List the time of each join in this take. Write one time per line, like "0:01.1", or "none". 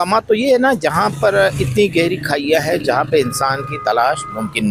none